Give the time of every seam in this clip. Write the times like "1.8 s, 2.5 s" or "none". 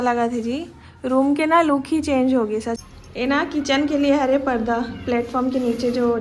2.8 s